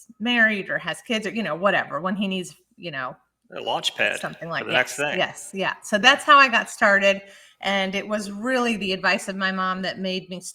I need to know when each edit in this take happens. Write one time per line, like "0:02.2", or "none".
none